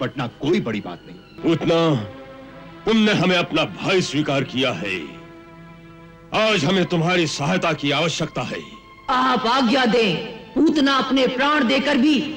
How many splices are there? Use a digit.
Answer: 1